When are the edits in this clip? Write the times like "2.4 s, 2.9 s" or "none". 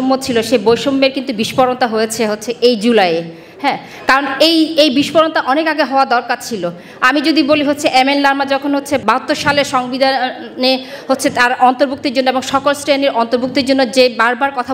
none